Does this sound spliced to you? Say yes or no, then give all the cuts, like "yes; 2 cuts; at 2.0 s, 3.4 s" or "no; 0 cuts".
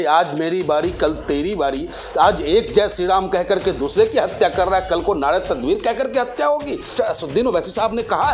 yes; 1 cut; at 6.9 s